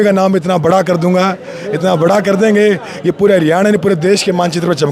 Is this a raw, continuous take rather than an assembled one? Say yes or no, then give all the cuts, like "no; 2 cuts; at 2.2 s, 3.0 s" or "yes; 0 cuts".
yes; 0 cuts